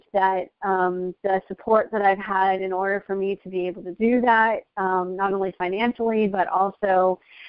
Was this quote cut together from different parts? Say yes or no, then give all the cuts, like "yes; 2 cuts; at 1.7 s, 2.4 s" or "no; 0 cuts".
no; 0 cuts